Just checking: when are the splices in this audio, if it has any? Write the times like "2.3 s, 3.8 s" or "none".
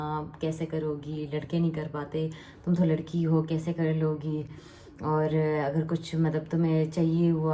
none